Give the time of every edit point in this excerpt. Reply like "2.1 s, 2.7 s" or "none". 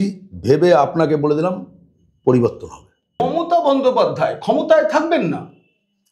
3.2 s